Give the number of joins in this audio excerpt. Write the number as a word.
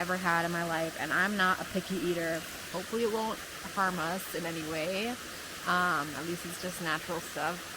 one